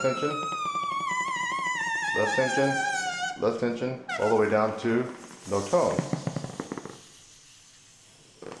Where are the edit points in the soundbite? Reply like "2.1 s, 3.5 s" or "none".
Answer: 6.4 s